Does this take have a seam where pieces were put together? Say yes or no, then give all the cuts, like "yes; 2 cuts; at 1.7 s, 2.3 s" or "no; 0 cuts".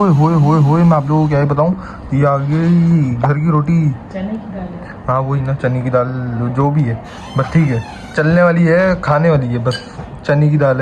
no; 0 cuts